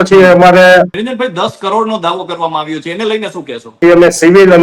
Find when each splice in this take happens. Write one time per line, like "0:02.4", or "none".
0:00.9
0:03.7